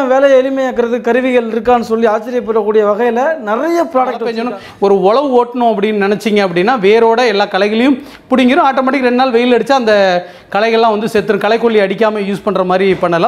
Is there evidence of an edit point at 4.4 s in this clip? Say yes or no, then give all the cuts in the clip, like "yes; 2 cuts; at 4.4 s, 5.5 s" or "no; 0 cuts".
yes; 1 cut; at 4.4 s